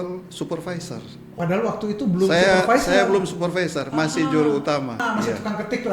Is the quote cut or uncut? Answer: cut